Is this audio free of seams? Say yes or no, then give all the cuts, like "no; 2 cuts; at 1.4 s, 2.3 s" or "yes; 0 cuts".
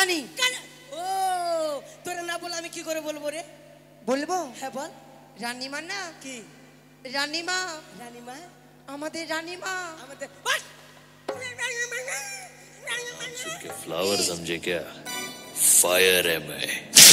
yes; 0 cuts